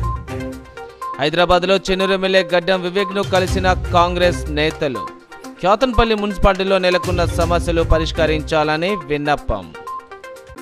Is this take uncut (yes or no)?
yes